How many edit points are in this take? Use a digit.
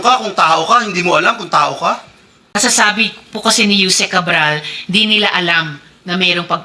1